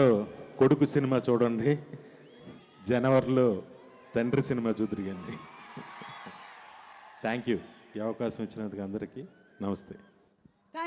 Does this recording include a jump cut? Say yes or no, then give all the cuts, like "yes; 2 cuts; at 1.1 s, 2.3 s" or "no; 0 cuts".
no; 0 cuts